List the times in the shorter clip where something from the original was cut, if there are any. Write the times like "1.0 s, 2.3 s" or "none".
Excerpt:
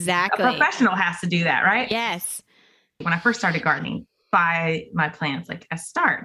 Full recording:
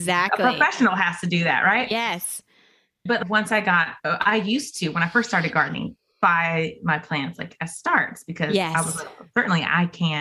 3.0 s

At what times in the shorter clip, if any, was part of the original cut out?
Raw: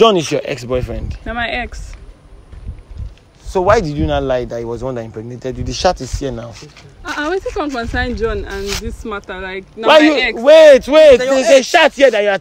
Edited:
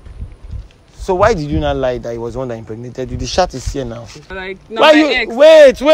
4.3 s

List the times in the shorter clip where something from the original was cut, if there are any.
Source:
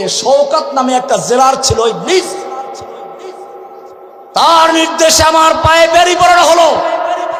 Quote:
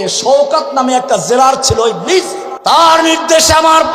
2.4 s

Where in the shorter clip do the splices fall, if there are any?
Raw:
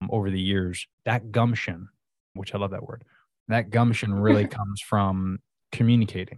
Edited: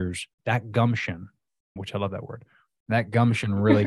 none

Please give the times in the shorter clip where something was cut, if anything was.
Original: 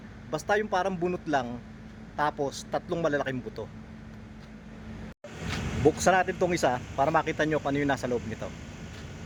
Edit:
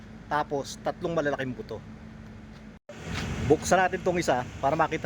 2.8 s

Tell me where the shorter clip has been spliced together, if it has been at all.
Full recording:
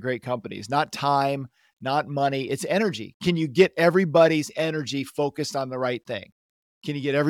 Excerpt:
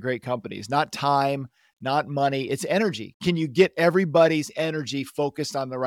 none

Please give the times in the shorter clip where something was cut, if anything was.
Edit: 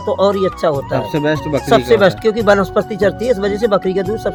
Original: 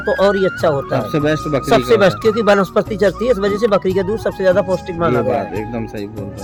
none

